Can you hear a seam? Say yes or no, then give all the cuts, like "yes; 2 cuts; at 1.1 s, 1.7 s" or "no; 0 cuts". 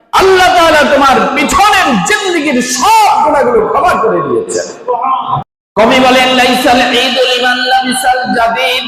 yes; 1 cut; at 5.5 s